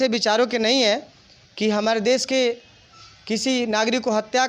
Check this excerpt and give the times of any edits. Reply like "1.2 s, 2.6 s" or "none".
none